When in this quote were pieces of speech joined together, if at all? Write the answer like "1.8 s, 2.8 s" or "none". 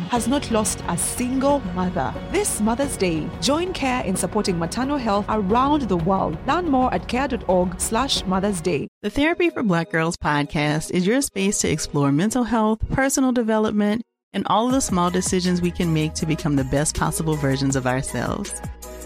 8.9 s